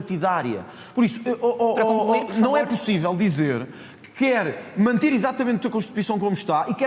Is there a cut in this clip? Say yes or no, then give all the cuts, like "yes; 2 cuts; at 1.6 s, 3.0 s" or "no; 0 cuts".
no; 0 cuts